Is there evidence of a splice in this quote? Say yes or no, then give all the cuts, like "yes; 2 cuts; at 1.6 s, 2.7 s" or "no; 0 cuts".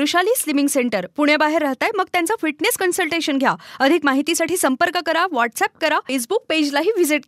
yes; 1 cut; at 6.1 s